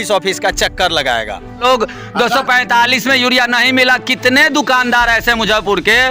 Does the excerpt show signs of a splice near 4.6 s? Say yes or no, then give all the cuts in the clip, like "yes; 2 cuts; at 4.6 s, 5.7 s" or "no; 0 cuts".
no; 1 cut; at 1.5 s